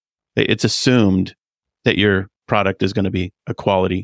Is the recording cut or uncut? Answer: uncut